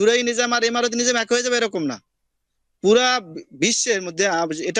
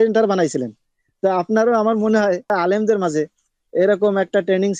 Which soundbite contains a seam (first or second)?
second